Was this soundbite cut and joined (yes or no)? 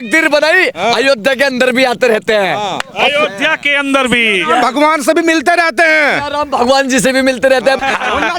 no